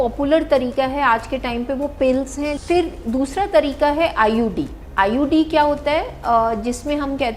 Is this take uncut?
no; 1 cut; at 2.6 s

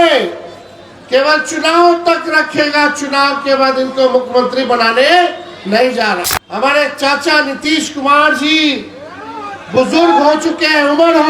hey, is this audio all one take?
no; 1 cut; at 6.4 s

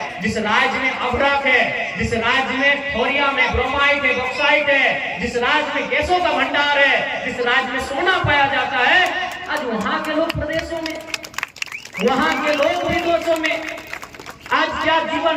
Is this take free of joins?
yes; 0 cuts

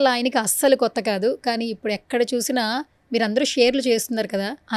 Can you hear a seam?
no; 0 cuts

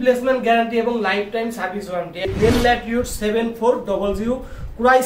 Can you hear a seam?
yes; 1 cut; at 2.2 s

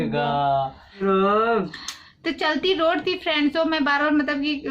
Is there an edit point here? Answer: yes; 1 cut; at 1.0 s

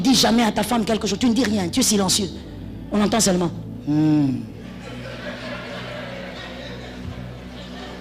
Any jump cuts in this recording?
no; 0 cuts

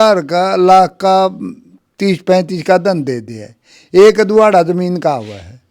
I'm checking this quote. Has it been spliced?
no; 0 cuts

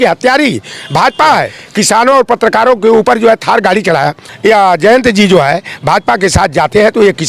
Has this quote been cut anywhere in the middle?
yes; 2 cuts; at 1.6 s, 4.2 s

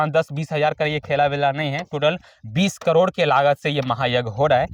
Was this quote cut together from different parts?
no; 0 cuts

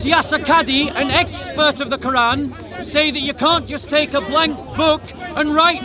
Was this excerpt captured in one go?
yes; 0 cuts

